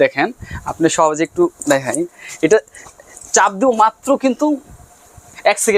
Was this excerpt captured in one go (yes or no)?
yes